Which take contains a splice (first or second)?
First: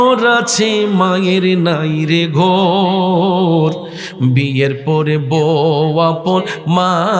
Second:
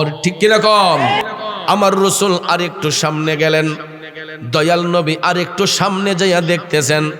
second